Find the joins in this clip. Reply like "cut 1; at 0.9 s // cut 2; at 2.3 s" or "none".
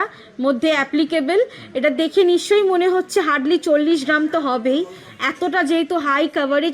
none